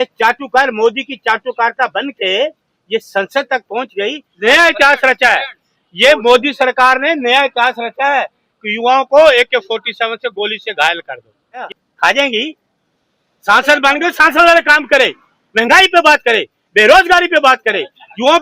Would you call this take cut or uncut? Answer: cut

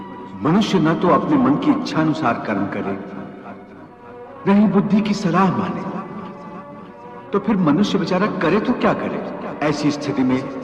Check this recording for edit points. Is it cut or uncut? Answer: cut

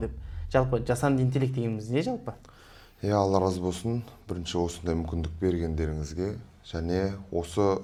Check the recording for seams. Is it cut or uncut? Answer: uncut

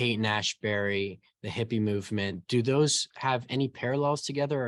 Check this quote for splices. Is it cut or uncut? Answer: uncut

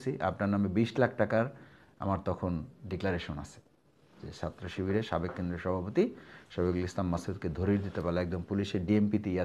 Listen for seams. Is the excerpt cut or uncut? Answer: uncut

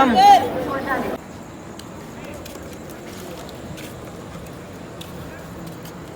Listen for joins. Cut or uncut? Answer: cut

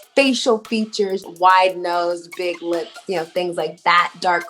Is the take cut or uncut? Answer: cut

